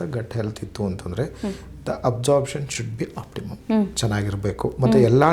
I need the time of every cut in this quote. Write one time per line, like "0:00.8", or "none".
none